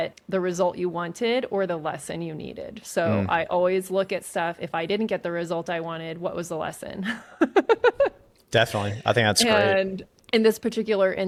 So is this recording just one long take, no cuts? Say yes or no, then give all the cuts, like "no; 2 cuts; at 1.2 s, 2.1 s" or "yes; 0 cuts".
yes; 0 cuts